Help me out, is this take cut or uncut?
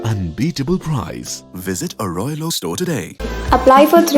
uncut